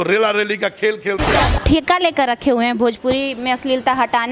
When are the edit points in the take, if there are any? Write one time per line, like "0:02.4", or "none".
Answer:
0:01.4